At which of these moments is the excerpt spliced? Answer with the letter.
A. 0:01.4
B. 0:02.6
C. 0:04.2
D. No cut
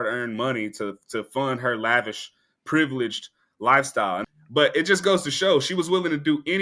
C